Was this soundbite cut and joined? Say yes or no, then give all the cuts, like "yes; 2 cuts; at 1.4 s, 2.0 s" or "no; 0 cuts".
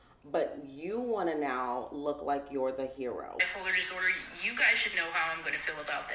yes; 1 cut; at 3.4 s